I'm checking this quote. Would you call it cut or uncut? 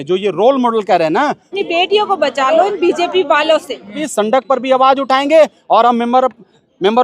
cut